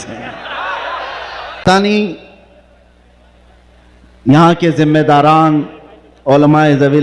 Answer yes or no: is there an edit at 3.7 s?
no